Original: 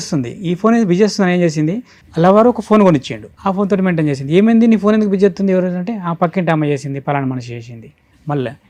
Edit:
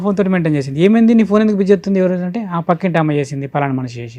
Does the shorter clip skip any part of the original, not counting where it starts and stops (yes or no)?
no